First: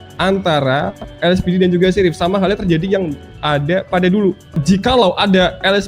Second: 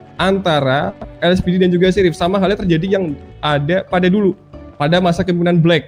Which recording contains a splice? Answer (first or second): first